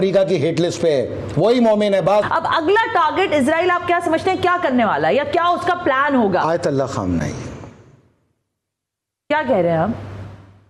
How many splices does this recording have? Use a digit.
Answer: 0